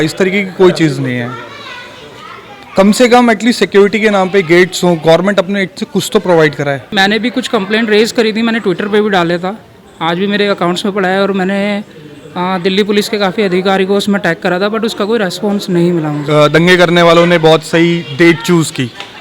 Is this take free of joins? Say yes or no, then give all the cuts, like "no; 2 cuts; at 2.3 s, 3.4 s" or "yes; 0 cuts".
no; 2 cuts; at 6.9 s, 16.3 s